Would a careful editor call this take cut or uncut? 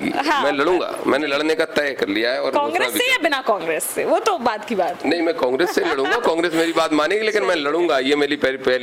uncut